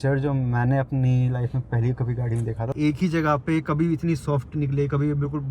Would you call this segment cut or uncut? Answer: cut